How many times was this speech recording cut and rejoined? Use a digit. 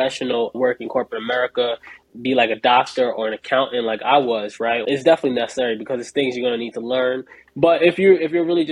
2